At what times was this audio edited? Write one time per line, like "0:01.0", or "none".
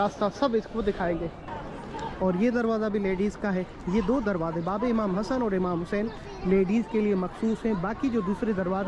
0:01.5

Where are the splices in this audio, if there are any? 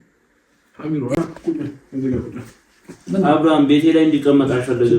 0:01.2

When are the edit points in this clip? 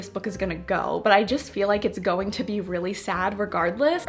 none

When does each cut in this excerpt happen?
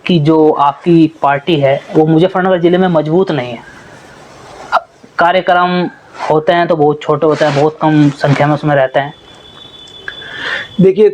none

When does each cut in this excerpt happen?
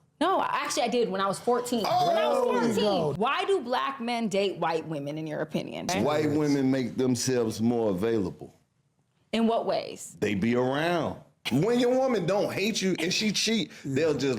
0:03.1
0:05.9
0:11.4

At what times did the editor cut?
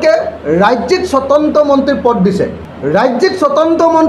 0:02.7

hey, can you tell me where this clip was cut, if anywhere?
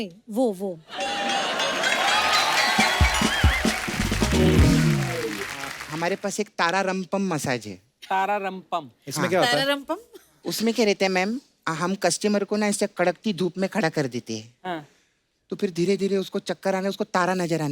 0:05.8

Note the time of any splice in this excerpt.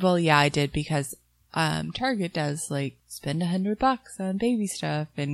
0:03.1

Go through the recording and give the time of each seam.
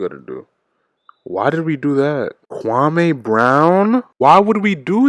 0:02.4
0:04.1

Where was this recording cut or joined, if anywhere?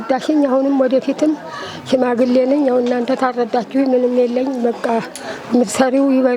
none

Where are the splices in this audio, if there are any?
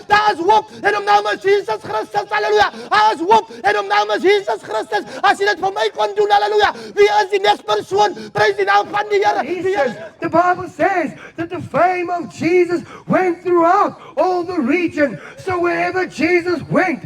0:09.6

